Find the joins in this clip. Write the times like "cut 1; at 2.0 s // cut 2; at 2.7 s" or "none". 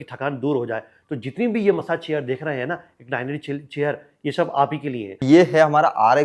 cut 1; at 5.1 s

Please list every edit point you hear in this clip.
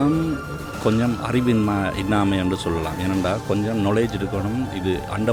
none

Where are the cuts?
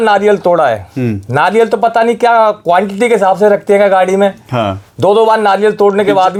none

